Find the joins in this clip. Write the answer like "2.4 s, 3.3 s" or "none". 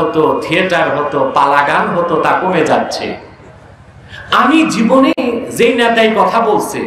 none